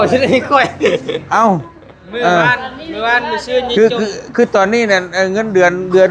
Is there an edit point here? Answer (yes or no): no